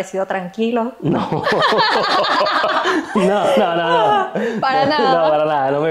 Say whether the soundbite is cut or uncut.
uncut